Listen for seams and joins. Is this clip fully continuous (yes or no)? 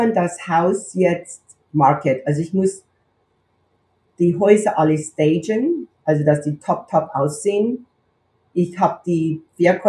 yes